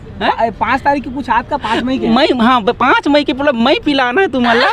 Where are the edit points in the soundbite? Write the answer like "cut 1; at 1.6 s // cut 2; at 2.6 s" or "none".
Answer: none